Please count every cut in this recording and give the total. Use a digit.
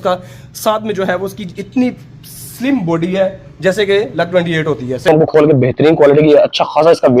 1